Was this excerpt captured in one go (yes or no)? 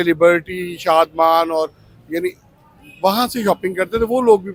yes